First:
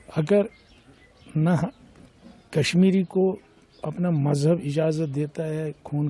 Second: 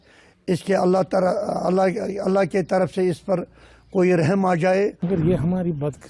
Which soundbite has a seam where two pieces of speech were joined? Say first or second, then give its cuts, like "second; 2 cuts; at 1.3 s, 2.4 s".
second; 1 cut; at 5.0 s